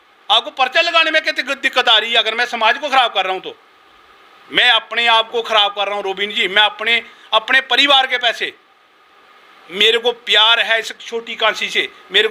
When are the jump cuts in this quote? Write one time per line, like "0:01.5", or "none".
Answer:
none

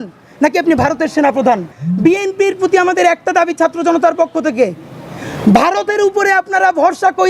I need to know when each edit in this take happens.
0:01.7

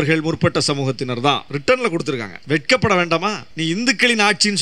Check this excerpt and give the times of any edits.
0:01.5
0:02.3
0:03.5

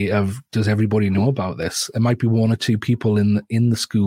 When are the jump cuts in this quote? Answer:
none

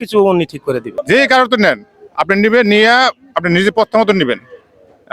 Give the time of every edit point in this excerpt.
0:00.9

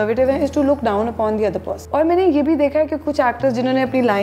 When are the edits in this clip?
0:01.7

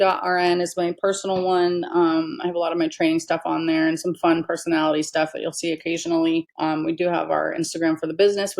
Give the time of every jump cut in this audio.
0:06.5

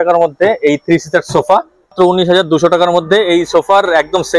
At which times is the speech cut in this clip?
0:01.9

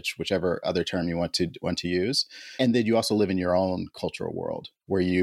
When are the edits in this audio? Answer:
none

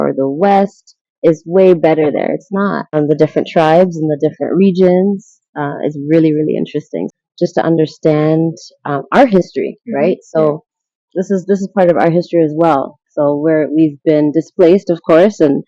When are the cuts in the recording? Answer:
0:02.9
0:07.1

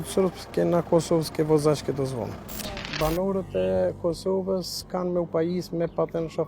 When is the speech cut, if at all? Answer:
0:02.9

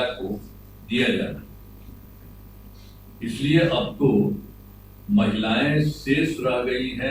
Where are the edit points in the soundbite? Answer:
none

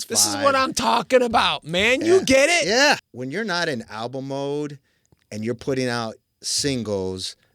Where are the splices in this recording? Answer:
0:03.1

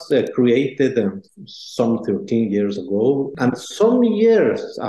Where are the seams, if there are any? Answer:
0:03.3

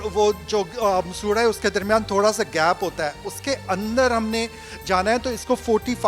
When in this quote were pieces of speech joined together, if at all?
none

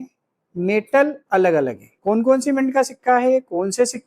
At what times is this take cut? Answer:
0:01.9

